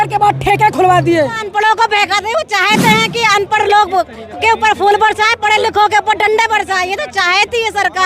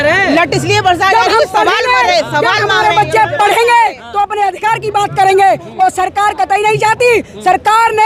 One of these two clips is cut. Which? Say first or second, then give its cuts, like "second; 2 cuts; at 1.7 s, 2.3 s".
first; 1 cut; at 1.5 s